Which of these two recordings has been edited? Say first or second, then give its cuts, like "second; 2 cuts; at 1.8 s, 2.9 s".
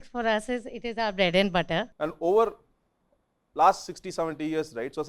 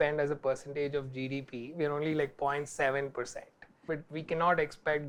first; 1 cut; at 1.9 s